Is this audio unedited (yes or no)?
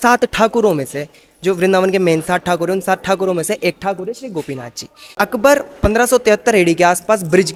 yes